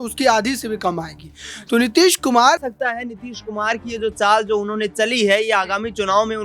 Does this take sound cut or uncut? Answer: cut